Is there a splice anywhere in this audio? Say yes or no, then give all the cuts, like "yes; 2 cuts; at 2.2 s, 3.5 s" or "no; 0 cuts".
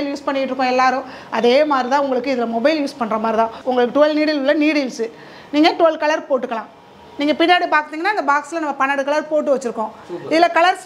no; 0 cuts